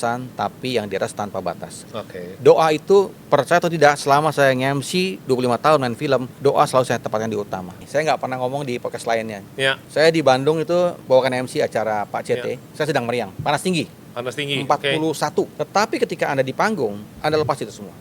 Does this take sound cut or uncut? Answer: cut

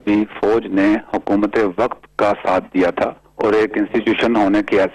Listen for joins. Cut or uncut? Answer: cut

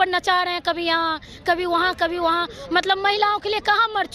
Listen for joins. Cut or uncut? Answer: uncut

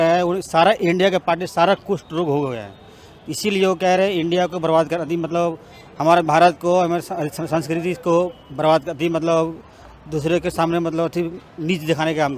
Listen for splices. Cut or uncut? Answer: uncut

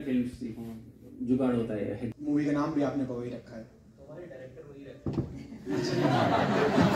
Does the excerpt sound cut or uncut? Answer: cut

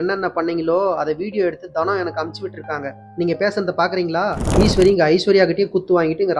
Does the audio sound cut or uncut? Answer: cut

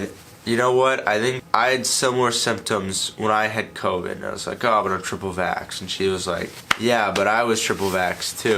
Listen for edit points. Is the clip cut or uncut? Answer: cut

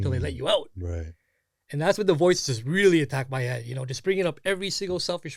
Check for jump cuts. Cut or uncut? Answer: uncut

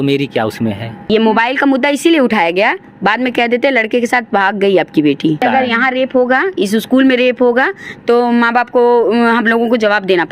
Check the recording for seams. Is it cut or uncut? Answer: cut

